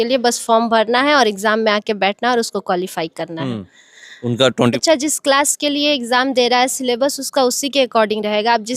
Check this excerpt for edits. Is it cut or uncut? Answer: cut